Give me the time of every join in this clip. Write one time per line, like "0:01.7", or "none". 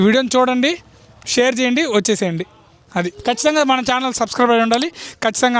none